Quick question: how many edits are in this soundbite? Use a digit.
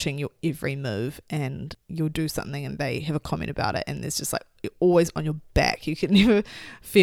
1